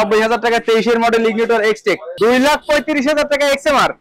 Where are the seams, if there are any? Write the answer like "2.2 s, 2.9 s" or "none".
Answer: 2.1 s